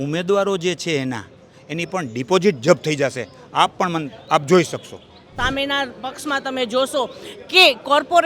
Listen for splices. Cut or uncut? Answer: cut